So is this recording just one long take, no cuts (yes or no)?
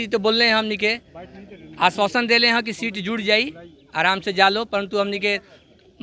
yes